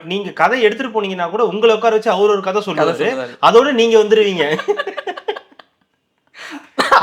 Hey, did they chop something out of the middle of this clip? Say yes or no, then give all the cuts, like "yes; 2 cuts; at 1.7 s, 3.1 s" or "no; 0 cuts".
no; 0 cuts